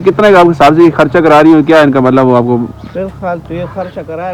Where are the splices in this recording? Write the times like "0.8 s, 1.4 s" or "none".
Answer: none